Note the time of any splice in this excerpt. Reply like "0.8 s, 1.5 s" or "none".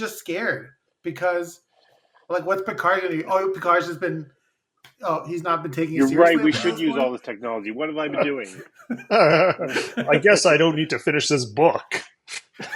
none